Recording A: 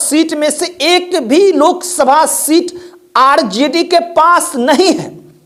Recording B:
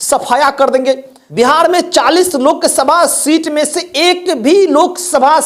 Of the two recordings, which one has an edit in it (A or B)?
B